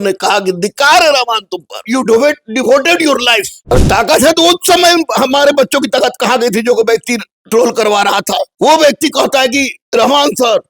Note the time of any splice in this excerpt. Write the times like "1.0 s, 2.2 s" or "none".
1.8 s, 3.5 s, 7.4 s, 8.5 s, 9.8 s